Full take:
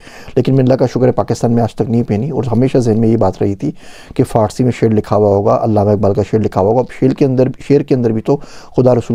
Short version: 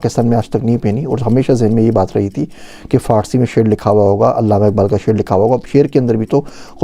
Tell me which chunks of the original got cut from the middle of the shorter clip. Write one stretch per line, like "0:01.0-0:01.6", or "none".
0:06.9-0:07.6